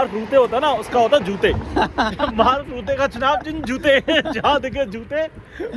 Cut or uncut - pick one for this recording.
uncut